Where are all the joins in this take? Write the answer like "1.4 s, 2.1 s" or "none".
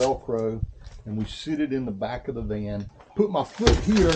2.9 s